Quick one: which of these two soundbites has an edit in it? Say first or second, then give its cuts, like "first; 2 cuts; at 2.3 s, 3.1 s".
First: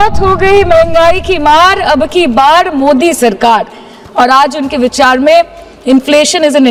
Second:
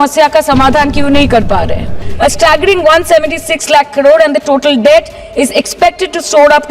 second; 1 cut; at 2.0 s